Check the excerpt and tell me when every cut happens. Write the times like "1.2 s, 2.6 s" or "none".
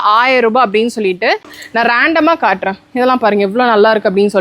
1.6 s